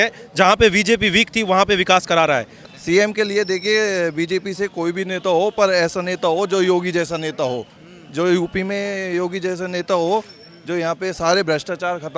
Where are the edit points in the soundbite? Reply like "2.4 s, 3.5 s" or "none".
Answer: 2.6 s